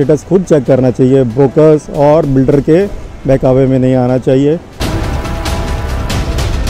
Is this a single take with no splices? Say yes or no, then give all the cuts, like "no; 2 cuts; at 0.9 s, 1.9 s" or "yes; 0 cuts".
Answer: no; 1 cut; at 4.7 s